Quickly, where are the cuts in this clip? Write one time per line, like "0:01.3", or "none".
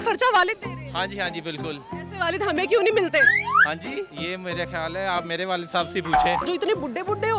0:04.2
0:06.4